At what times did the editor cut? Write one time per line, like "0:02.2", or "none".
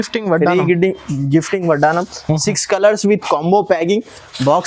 none